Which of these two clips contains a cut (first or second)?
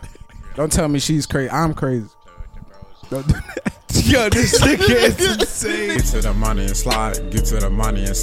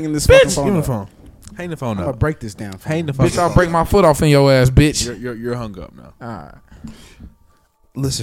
first